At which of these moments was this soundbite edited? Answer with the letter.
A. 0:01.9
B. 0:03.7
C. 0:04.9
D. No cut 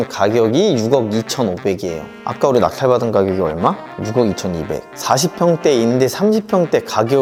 D